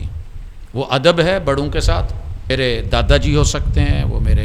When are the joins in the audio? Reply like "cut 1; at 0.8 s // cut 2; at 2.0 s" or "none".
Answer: cut 1; at 2.5 s